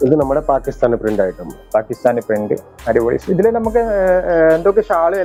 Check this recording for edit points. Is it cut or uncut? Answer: uncut